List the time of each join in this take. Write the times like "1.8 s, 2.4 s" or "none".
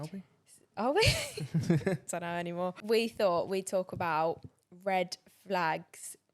2.8 s